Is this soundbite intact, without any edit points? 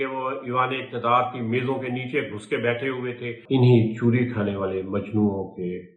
no; 1 cut; at 3.4 s

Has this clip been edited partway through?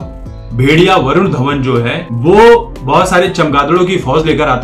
yes; 2 cuts; at 2.0 s, 2.8 s

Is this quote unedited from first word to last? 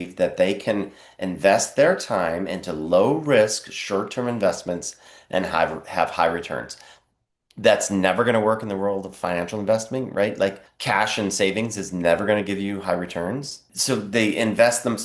no; 2 cuts; at 10.7 s, 13.7 s

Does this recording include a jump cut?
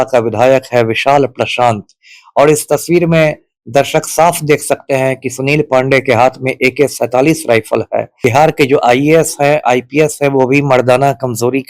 yes; 1 cut; at 8.2 s

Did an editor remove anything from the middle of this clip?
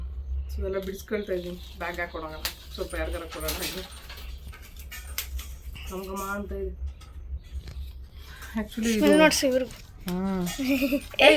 no; 0 cuts

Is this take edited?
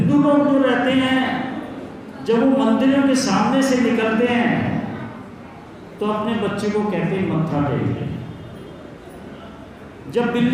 no; 0 cuts

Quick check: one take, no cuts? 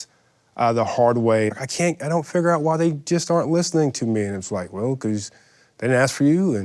no; 1 cut; at 1.5 s

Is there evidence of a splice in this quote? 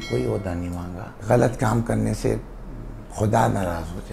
yes; 1 cut; at 1.2 s

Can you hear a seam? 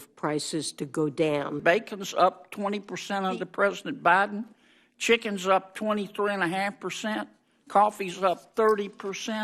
yes; 1 cut; at 1.6 s

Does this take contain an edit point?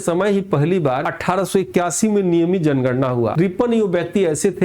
yes; 2 cuts; at 1.1 s, 3.3 s

